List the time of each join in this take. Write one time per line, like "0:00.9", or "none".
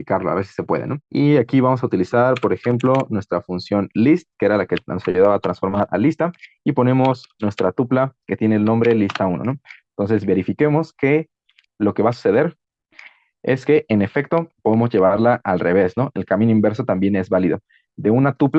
0:01.0